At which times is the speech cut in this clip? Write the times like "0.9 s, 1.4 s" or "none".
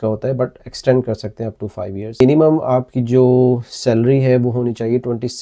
2.2 s

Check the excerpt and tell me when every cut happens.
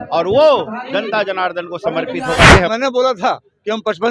2.7 s

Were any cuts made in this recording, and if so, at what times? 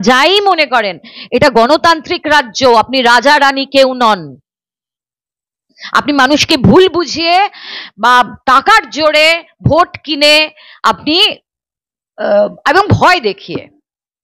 none

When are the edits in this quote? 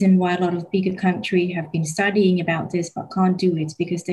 none

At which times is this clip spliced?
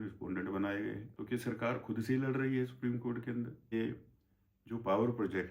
1.1 s, 3.7 s

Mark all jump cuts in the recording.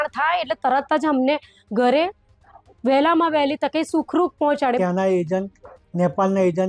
4.8 s

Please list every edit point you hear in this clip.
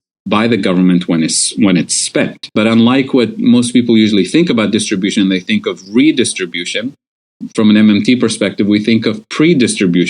2.4 s

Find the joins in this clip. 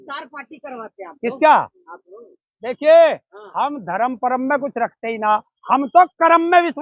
none

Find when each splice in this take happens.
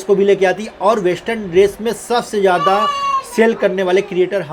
none

